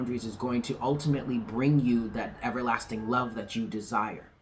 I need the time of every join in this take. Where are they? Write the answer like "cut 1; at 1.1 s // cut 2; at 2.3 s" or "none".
none